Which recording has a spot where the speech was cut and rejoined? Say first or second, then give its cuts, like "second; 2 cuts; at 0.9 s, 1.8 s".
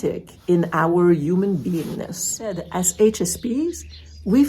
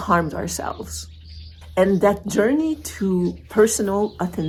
first; 1 cut; at 2.6 s